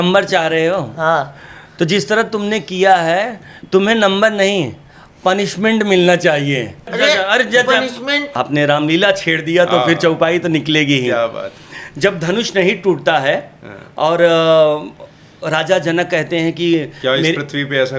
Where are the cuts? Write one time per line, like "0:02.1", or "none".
0:06.8
0:08.3